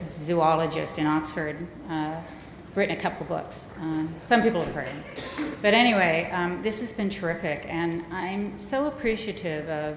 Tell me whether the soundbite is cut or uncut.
cut